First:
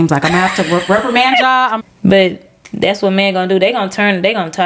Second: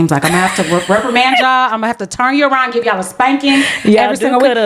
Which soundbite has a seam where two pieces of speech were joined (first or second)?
first